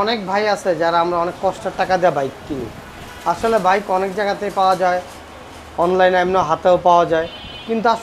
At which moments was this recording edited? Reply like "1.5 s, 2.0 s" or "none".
none